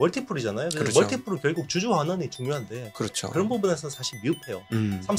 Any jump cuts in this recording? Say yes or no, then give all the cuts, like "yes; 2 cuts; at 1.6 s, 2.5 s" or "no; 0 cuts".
no; 0 cuts